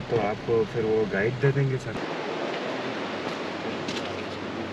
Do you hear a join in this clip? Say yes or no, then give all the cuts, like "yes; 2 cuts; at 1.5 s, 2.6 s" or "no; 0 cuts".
yes; 1 cut; at 2.0 s